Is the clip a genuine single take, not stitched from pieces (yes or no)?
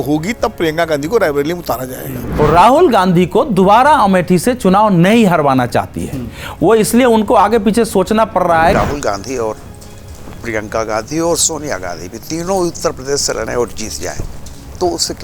no